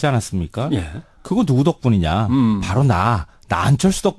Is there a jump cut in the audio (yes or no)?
yes